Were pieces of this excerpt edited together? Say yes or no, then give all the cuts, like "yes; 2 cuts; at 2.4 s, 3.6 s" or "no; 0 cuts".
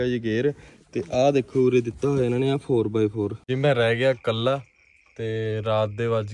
yes; 1 cut; at 3.5 s